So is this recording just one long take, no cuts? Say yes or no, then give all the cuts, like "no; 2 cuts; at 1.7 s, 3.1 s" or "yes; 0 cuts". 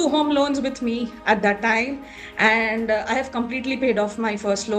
yes; 0 cuts